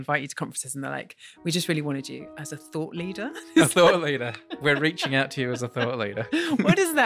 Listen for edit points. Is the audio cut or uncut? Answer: uncut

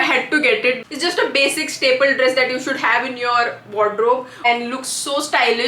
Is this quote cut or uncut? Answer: cut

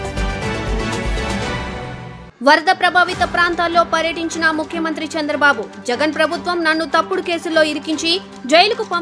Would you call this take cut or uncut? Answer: cut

